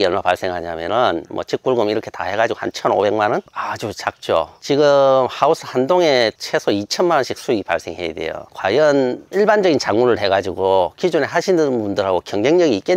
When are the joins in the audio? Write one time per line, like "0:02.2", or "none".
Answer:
0:08.5